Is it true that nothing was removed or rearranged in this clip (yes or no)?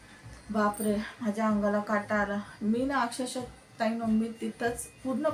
yes